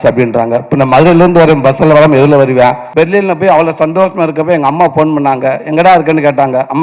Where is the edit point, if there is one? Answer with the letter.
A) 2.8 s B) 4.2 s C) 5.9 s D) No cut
A